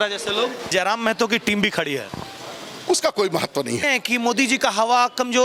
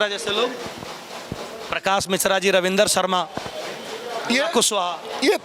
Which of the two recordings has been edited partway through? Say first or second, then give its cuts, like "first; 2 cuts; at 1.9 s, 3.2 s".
first; 2 cuts; at 0.7 s, 3.8 s